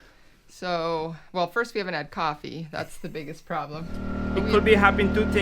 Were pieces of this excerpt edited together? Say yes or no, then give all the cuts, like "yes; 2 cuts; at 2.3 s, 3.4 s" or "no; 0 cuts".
yes; 1 cut; at 4.1 s